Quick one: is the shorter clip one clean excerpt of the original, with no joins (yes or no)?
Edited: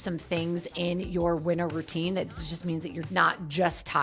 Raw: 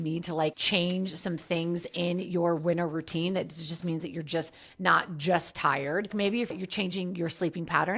no